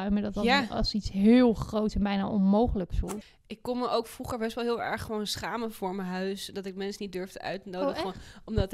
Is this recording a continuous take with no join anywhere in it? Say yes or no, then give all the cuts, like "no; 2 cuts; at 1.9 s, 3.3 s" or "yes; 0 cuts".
no; 1 cut; at 3.0 s